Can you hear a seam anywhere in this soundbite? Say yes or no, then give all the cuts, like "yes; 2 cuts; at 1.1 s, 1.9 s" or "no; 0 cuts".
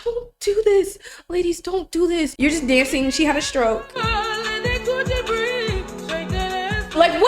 yes; 1 cut; at 2.3 s